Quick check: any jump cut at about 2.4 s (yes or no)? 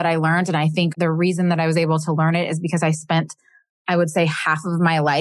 no